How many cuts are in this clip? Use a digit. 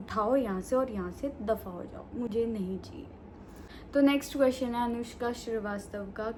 0